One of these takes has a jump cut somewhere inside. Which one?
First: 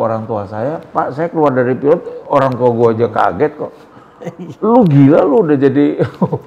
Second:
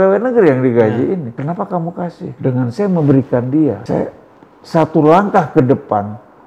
second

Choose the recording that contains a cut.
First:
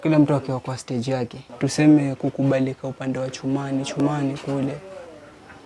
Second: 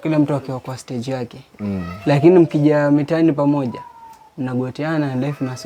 first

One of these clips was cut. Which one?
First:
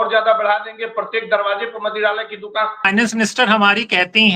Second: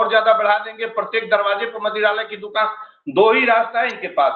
first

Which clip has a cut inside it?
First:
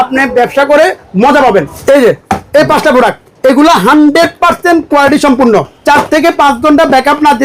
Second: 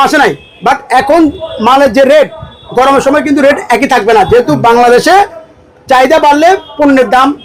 first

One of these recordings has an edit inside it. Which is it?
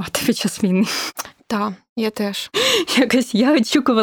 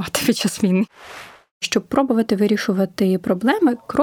second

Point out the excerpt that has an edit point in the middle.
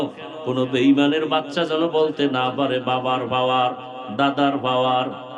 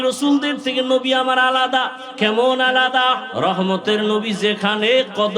second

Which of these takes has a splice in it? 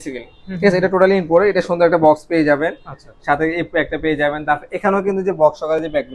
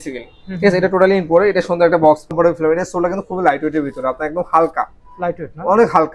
second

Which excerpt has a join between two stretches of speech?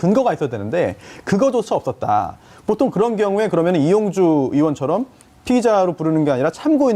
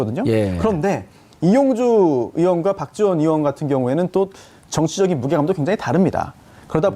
second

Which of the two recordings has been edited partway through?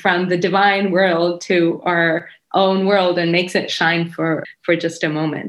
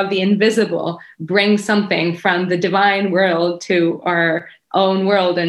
first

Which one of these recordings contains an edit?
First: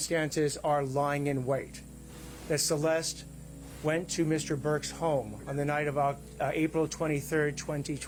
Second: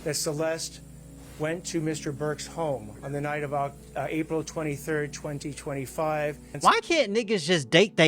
second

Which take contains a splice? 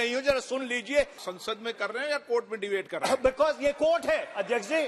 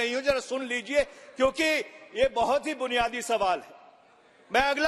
first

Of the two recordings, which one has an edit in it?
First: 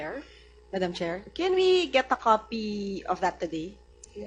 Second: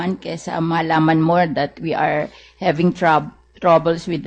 second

